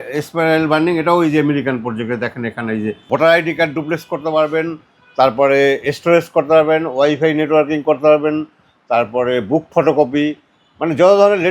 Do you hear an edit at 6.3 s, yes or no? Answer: no